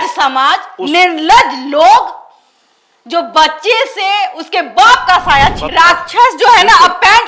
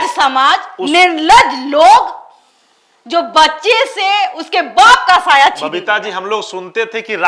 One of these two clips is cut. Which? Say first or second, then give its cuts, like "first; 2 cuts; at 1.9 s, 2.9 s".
first; 1 cut; at 5.6 s